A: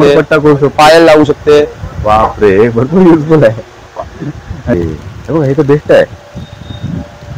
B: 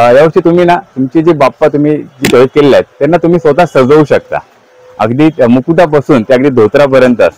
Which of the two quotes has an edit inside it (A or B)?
A